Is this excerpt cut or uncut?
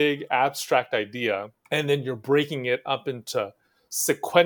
cut